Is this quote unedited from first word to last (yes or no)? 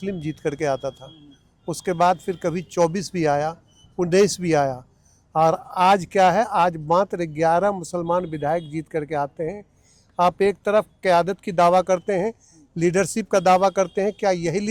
yes